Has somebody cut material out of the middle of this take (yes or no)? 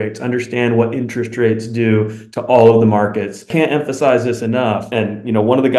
yes